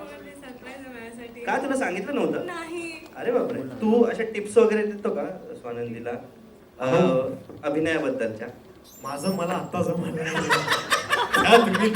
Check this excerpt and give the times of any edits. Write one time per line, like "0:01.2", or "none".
0:03.7